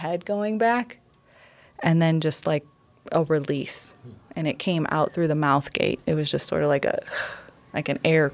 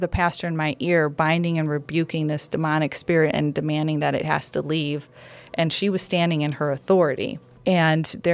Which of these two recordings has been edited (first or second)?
second